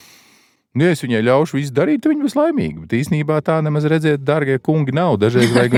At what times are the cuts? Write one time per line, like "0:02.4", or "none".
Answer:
none